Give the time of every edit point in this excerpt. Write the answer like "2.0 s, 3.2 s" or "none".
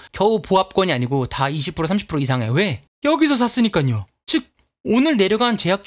none